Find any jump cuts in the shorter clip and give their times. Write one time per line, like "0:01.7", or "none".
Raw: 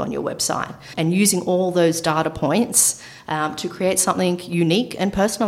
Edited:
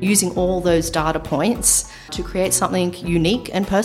0:02.1